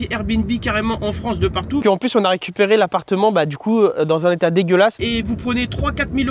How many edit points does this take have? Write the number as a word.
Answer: two